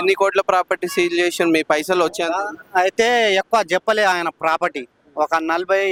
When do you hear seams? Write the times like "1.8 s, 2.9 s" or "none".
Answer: none